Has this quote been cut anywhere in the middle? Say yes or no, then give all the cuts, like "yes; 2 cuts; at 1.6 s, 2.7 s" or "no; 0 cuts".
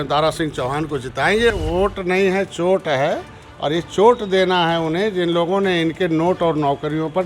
yes; 1 cut; at 1.5 s